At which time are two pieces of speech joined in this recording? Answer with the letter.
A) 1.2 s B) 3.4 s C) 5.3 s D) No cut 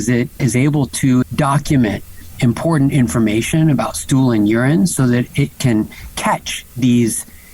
A